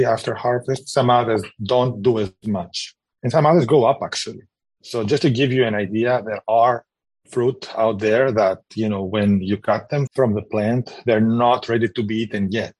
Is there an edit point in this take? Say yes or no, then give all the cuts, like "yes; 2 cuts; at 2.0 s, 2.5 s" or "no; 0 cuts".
yes; 1 cut; at 10.1 s